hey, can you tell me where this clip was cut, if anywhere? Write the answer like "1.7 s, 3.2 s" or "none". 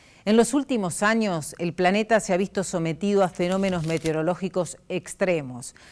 none